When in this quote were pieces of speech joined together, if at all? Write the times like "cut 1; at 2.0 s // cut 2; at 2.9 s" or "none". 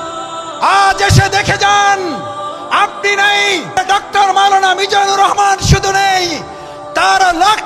cut 1; at 3.8 s